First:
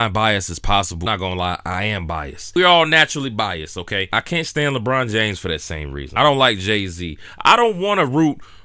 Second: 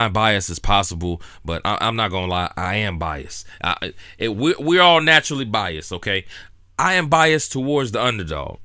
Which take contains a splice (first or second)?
first